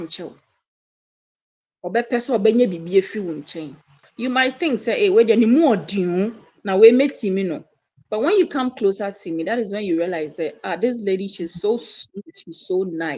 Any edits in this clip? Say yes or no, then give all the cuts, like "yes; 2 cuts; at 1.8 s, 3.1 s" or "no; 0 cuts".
yes; 1 cut; at 4.0 s